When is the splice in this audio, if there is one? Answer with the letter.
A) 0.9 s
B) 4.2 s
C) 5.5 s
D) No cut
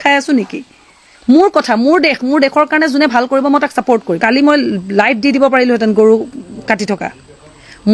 B